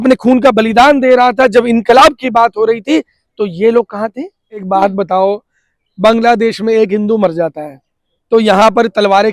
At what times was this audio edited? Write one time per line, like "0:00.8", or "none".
0:04.6